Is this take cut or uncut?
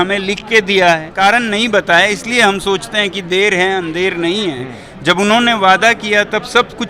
cut